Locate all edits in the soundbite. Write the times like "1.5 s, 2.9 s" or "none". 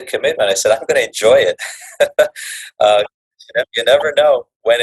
3.6 s